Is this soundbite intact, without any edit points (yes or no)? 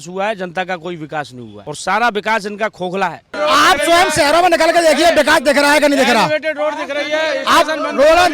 no